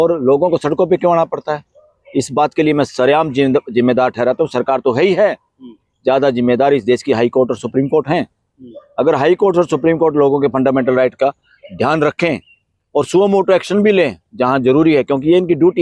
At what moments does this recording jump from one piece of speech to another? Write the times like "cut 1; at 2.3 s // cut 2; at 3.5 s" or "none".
none